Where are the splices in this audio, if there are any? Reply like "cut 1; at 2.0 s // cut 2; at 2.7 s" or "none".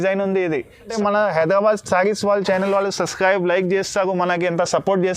cut 1; at 0.9 s